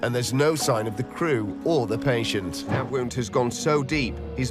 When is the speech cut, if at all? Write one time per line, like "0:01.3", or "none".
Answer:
0:02.7